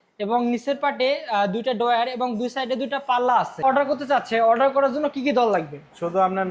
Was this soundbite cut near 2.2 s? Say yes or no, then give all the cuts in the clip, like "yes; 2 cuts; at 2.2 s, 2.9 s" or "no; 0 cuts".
no; 1 cut; at 3.6 s